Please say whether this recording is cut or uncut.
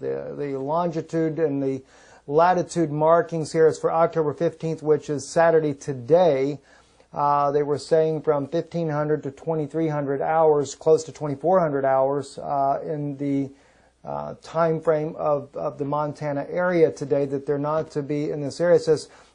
cut